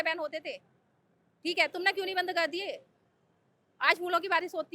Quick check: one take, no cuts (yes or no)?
yes